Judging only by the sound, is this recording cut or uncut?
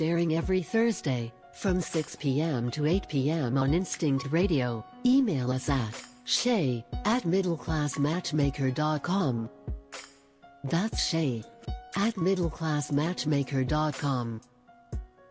uncut